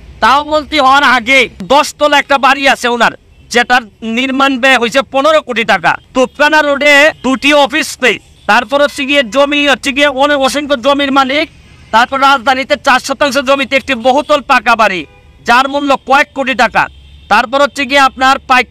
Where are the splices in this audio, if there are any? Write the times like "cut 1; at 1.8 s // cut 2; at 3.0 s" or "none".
cut 1; at 1.6 s // cut 2; at 6.0 s // cut 3; at 7.2 s // cut 4; at 8.3 s